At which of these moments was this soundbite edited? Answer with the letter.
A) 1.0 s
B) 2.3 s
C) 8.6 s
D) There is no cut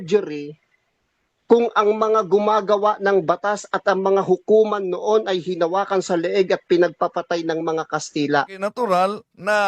C